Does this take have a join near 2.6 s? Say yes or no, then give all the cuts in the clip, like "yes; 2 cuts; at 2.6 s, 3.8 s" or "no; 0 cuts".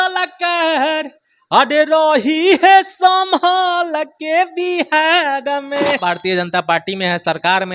no; 1 cut; at 6.2 s